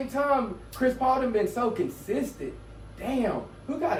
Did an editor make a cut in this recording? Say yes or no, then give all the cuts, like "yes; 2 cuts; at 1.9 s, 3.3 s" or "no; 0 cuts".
no; 0 cuts